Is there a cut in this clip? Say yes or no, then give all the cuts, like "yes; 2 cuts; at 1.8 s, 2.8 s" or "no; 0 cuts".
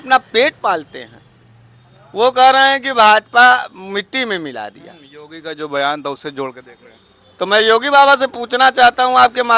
no; 0 cuts